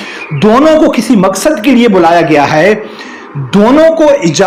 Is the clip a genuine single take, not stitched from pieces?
yes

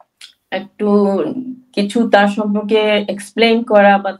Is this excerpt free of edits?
yes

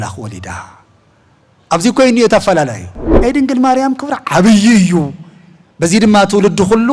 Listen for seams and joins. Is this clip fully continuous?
no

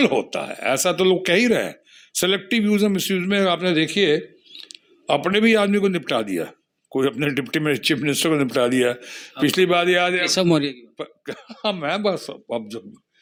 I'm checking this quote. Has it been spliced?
no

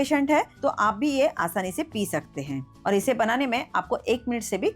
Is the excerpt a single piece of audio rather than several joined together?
no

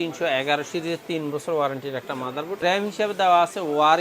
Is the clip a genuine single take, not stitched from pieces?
no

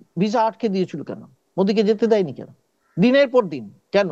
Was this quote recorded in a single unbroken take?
yes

